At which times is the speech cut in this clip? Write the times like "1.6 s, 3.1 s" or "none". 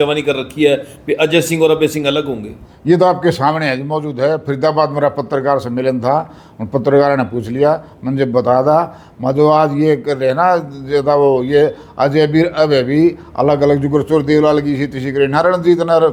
none